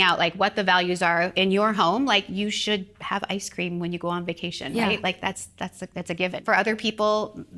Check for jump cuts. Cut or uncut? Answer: cut